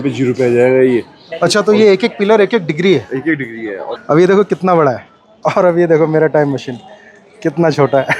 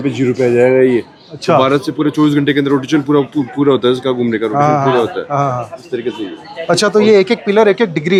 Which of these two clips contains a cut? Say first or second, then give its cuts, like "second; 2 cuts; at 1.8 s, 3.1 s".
first; 2 cuts; at 1.2 s, 3.9 s